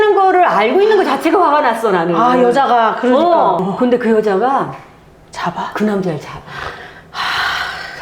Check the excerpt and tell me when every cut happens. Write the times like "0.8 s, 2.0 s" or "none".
3.6 s